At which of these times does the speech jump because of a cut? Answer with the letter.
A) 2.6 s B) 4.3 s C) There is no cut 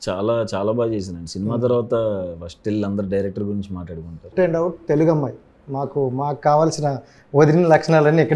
B